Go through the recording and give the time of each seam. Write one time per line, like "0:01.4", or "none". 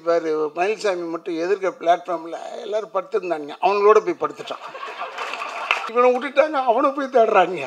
0:05.9